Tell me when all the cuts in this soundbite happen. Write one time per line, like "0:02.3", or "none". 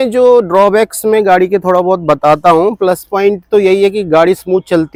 none